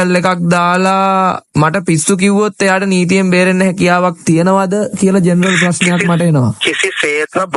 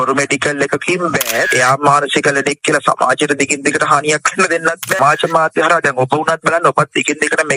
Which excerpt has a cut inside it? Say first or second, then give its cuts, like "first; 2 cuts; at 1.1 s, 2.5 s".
second; 2 cuts; at 1.5 s, 5.0 s